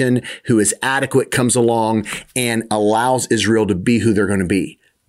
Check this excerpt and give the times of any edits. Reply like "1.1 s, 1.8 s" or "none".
none